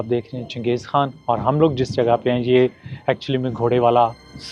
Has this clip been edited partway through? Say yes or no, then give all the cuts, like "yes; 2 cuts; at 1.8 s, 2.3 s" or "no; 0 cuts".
no; 0 cuts